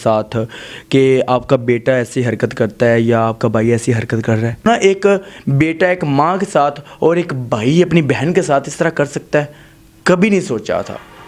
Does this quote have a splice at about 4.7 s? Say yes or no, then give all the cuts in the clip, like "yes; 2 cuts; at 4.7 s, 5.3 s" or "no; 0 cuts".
yes; 1 cut; at 4.7 s